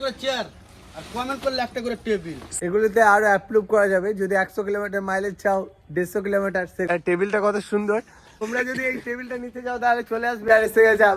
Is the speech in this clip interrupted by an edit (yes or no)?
yes